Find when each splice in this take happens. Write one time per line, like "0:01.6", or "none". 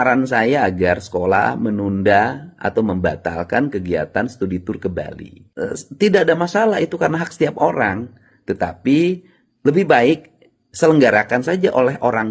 none